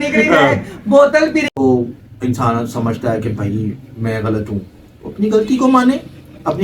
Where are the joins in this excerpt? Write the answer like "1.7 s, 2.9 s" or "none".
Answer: 1.5 s